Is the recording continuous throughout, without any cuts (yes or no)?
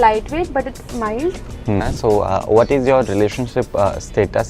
no